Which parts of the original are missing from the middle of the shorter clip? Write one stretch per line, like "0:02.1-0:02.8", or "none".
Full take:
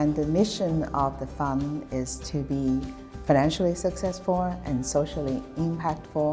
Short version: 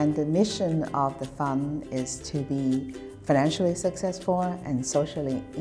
none